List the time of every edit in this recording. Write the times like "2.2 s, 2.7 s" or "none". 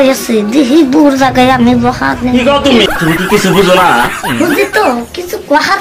2.9 s